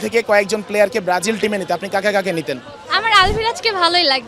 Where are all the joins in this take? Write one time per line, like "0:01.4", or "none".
0:02.7